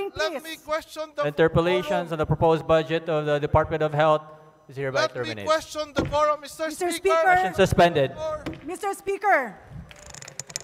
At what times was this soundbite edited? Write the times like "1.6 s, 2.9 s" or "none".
none